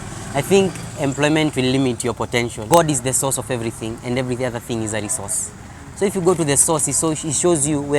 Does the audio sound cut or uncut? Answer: cut